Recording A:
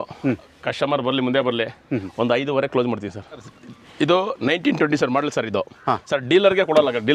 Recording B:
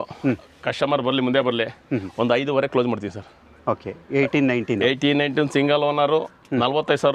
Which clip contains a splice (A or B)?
A